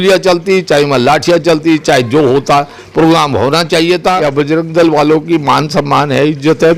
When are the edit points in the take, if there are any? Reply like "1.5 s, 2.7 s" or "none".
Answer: 4.3 s